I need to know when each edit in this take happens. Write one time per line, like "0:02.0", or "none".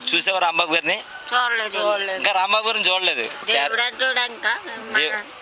0:03.4